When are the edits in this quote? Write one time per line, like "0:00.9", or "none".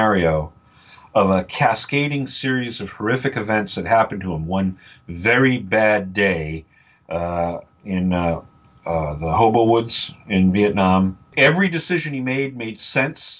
0:11.3